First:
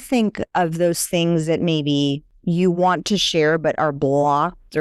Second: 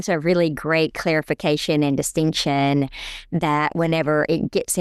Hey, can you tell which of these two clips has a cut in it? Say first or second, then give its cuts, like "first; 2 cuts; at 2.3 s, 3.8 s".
first; 1 cut; at 2.3 s